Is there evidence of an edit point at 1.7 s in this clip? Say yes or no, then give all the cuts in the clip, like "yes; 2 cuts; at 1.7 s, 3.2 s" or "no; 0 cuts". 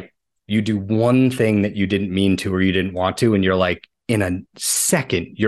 no; 1 cut; at 3.9 s